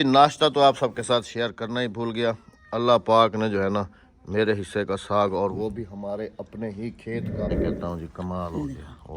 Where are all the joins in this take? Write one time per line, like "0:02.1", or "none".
0:07.5